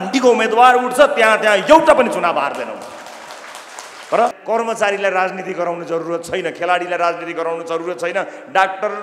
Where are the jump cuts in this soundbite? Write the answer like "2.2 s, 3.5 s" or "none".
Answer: 4.4 s